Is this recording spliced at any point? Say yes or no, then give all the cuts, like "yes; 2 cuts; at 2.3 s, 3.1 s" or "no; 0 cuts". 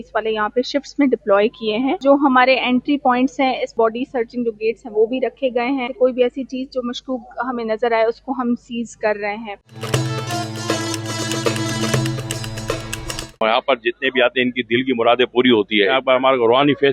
yes; 6 cuts; at 2.0 s, 3.7 s, 5.9 s, 9.7 s, 13.3 s, 15.9 s